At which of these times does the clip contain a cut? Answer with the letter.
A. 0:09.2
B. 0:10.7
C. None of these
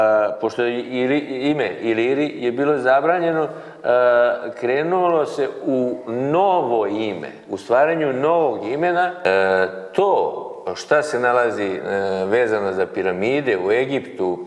A